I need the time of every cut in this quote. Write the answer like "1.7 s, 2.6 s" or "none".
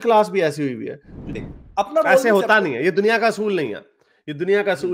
1.2 s